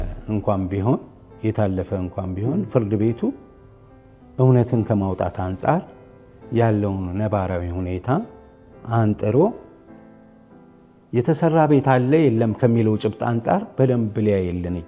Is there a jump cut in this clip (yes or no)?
no